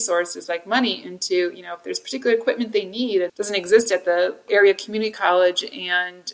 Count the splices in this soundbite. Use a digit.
2